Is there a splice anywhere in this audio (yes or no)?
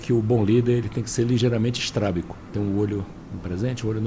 yes